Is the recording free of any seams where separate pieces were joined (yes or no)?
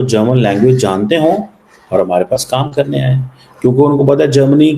yes